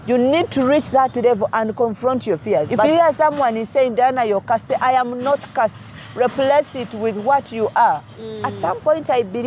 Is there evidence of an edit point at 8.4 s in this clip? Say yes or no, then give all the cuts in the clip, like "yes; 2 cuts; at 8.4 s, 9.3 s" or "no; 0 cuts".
yes; 2 cuts; at 2.9 s, 8.4 s